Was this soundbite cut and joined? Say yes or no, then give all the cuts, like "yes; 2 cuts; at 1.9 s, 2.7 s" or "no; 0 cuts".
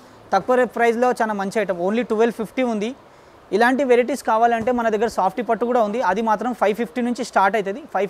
no; 0 cuts